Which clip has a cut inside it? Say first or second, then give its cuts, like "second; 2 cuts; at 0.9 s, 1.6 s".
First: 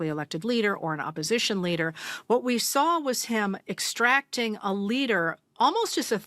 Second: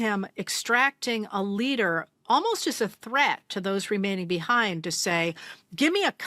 first; 1 cut; at 2.1 s